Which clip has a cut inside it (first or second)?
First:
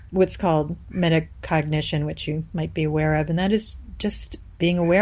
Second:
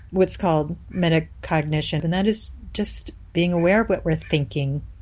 second